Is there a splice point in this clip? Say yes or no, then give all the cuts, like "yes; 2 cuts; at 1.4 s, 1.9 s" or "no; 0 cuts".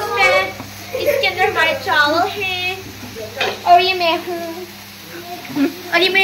no; 0 cuts